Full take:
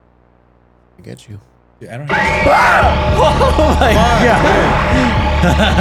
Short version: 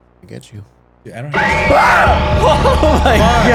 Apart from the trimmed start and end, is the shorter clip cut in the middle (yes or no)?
no